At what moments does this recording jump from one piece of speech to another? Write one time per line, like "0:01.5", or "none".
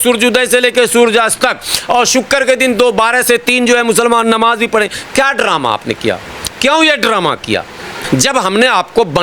0:07.9